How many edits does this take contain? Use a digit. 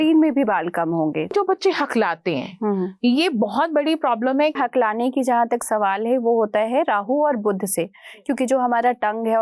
2